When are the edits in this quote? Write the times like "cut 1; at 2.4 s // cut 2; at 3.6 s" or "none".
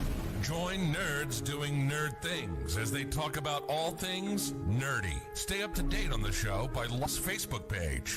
cut 1; at 7.1 s